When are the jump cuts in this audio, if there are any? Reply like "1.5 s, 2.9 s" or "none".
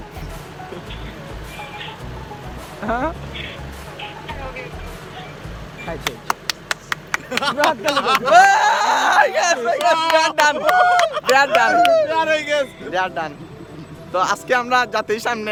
none

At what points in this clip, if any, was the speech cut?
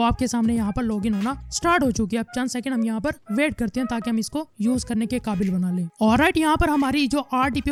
none

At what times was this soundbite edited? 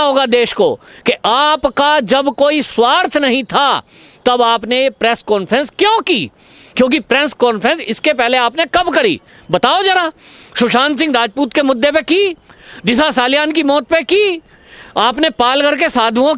none

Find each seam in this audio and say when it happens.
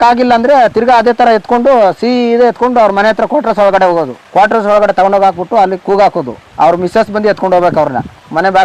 none

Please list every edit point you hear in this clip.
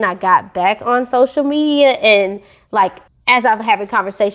3.1 s

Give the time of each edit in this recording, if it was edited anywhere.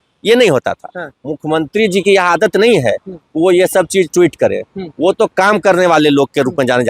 none

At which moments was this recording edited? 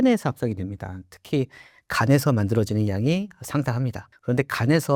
none

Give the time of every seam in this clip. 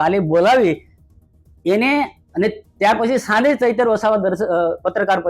none

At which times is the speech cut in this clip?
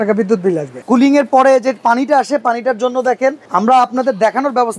0.8 s, 3.4 s

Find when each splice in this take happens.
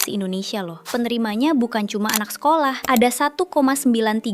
0.8 s, 2.8 s

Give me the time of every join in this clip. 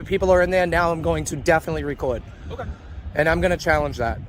none

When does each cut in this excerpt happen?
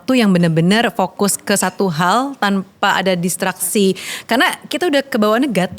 none

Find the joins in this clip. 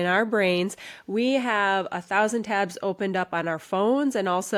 none

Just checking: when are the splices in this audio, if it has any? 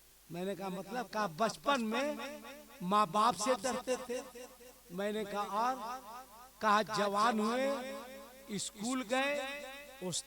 none

